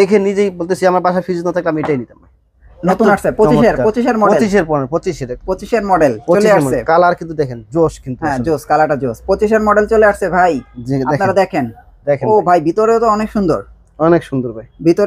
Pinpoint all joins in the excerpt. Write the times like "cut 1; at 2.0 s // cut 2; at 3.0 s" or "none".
none